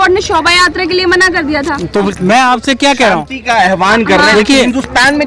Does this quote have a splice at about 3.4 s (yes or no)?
no